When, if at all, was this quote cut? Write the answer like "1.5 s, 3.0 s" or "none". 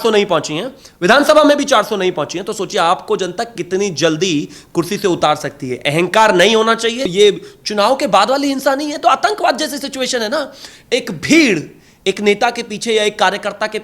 7.0 s